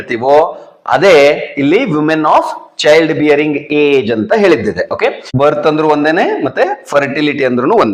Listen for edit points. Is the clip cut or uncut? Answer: cut